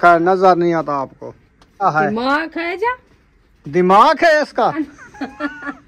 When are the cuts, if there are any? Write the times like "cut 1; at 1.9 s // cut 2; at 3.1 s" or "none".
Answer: cut 1; at 1.8 s // cut 2; at 4.8 s